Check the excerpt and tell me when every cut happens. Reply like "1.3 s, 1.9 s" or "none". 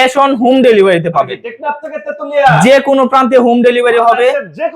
none